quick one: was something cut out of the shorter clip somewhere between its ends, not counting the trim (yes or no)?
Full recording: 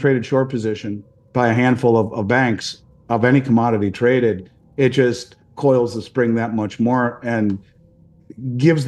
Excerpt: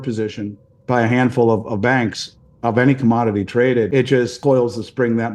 yes